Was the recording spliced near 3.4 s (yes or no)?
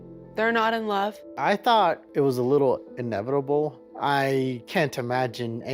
no